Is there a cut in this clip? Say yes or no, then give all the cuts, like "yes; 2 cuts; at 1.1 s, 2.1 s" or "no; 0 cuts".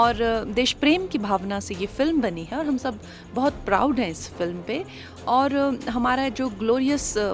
no; 0 cuts